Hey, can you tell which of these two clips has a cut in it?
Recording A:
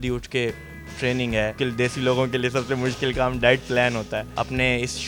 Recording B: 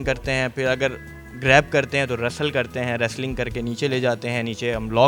A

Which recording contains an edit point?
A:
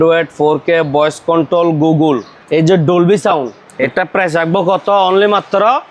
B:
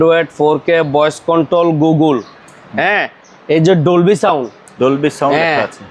A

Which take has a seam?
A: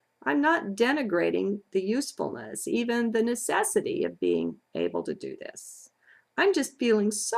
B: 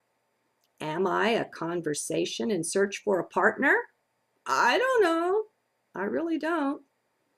A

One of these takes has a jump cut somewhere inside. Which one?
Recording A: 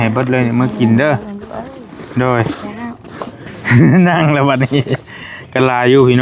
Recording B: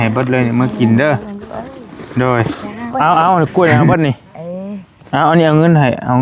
B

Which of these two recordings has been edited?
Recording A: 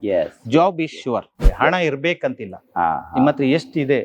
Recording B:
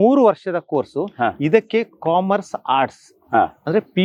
A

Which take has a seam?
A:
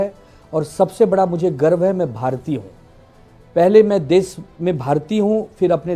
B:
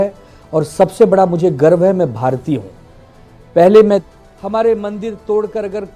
B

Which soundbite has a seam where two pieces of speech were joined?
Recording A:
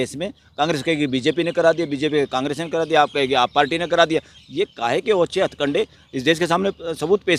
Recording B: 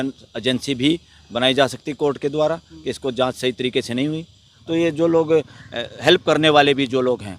B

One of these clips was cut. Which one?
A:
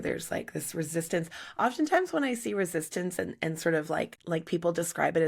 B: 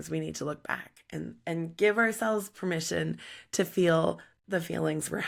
A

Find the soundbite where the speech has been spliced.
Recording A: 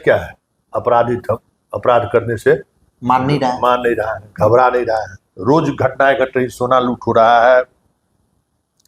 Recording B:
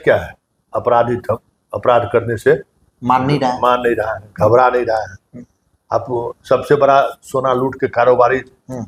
A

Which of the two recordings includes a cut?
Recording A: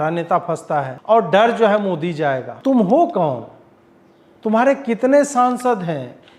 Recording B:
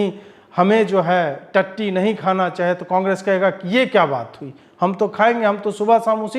A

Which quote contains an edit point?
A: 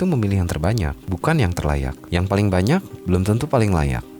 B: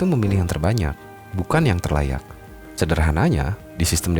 A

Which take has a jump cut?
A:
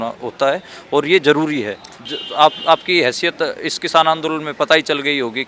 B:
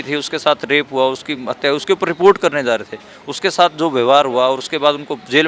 A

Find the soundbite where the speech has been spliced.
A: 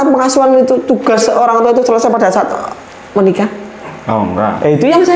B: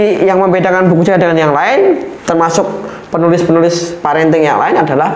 B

